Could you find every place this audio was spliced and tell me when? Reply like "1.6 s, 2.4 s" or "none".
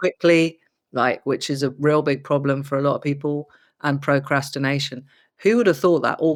none